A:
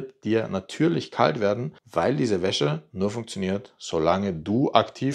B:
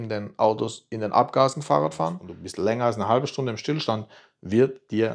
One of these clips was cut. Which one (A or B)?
B